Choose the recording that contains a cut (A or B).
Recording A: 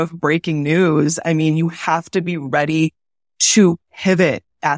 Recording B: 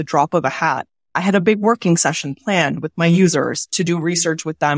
B